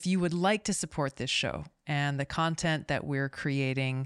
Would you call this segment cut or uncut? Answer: uncut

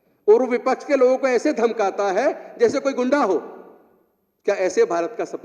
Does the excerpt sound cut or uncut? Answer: uncut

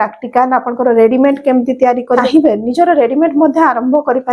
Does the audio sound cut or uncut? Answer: cut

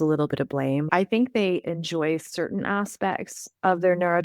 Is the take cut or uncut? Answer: cut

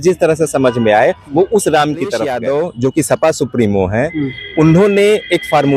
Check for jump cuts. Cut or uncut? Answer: cut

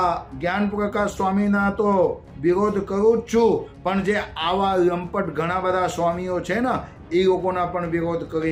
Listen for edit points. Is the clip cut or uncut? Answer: uncut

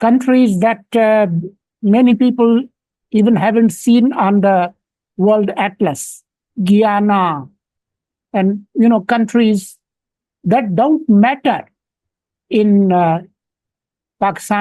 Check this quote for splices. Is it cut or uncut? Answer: uncut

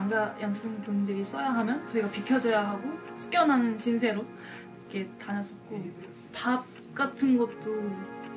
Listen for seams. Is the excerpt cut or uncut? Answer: cut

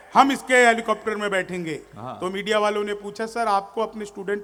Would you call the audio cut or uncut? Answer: uncut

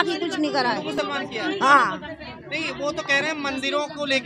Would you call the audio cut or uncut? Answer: uncut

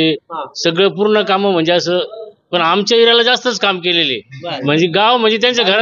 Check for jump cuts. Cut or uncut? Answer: cut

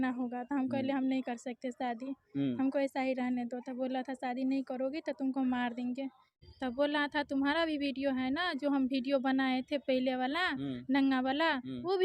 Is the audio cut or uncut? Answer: cut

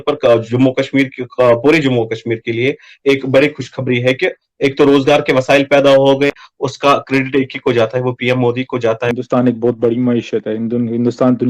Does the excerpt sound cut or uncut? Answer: cut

